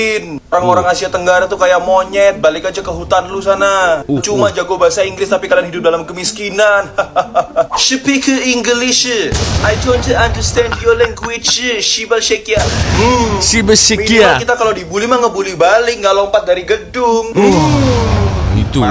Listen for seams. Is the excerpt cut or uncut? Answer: uncut